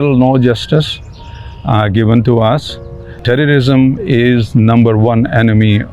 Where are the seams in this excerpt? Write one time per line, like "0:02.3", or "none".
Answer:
0:03.1